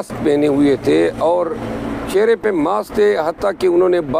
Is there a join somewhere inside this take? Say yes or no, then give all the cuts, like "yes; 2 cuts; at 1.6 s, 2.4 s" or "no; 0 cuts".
no; 0 cuts